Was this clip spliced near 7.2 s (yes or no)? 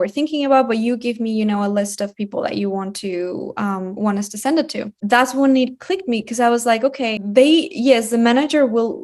yes